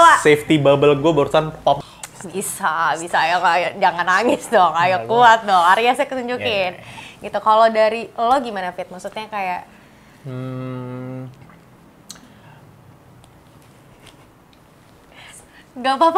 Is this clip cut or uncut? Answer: cut